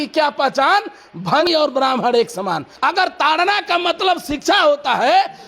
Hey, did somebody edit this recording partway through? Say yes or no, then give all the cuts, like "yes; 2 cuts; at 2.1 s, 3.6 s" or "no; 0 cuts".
yes; 2 cuts; at 1.4 s, 2.7 s